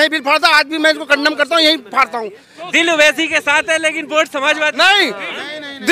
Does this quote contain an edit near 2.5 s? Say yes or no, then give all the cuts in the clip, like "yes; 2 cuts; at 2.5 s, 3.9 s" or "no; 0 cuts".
yes; 1 cut; at 2.5 s